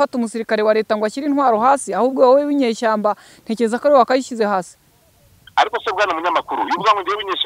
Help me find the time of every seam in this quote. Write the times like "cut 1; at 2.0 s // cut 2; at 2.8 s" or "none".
none